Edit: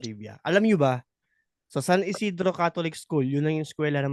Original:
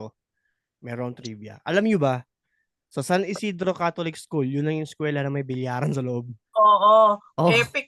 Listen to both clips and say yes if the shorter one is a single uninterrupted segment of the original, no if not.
yes